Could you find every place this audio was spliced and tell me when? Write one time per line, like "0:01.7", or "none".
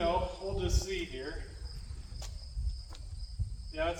none